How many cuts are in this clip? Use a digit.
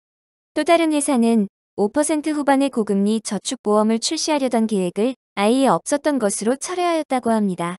1